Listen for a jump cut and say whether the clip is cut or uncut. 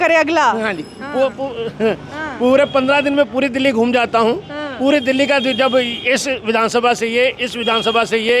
uncut